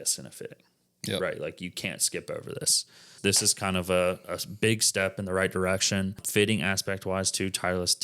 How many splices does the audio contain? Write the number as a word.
two